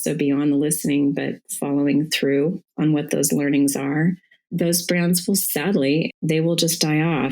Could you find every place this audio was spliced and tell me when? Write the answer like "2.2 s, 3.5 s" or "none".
4.5 s, 5.9 s